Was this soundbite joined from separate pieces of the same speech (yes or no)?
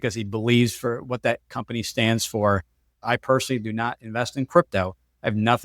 yes